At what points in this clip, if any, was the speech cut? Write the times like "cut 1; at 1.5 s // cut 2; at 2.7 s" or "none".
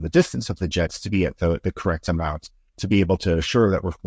none